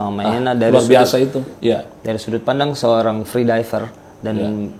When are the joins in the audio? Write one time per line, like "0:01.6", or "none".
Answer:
0:01.5